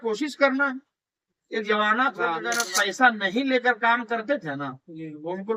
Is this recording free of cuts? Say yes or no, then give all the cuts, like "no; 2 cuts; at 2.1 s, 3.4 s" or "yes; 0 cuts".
no; 1 cut; at 2.6 s